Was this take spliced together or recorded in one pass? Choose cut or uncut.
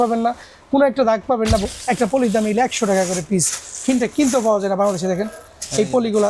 cut